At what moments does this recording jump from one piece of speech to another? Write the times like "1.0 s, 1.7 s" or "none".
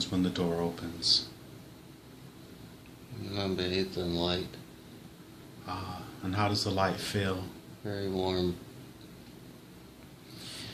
none